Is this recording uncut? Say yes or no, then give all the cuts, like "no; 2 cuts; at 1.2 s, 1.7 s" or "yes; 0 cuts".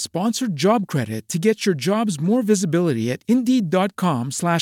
yes; 0 cuts